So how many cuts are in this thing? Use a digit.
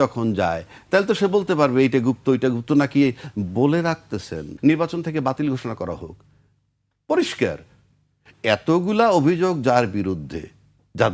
1